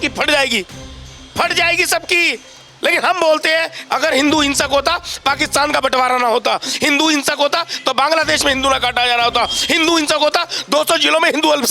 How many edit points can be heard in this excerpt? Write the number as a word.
one